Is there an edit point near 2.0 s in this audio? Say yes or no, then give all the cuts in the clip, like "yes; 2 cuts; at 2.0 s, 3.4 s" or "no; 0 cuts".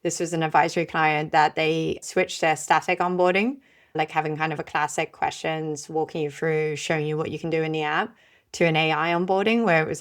yes; 2 cuts; at 2.0 s, 4.0 s